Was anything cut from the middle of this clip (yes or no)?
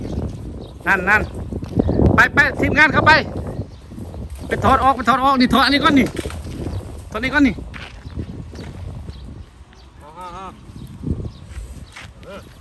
no